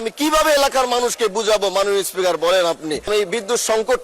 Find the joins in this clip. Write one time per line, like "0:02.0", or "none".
0:03.1